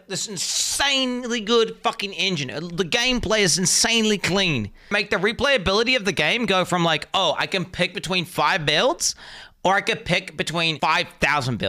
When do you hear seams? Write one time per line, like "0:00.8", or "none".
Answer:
0:04.9
0:10.7